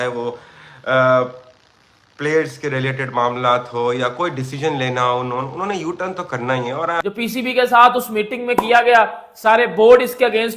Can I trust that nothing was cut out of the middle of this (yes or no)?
no